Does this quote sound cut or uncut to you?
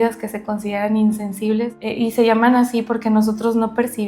cut